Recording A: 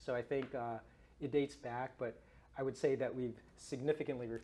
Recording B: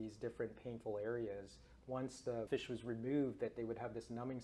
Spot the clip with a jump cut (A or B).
B